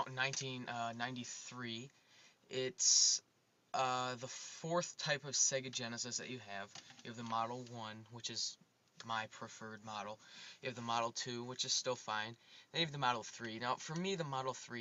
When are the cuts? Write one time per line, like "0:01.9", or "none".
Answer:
none